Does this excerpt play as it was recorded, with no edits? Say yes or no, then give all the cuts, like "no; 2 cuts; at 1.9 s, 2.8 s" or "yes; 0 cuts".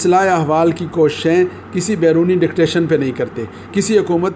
yes; 0 cuts